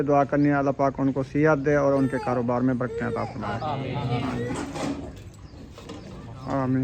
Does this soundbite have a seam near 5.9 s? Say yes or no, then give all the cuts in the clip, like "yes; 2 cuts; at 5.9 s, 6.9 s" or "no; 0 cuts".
no; 1 cut; at 4.5 s